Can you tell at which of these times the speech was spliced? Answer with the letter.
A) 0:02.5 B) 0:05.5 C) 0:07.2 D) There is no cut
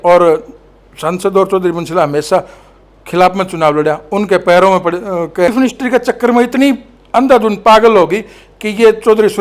B